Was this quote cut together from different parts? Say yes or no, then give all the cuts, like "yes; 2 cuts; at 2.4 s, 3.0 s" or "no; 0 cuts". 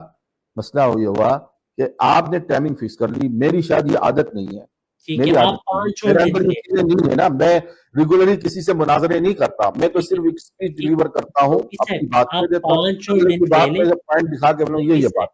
no; 0 cuts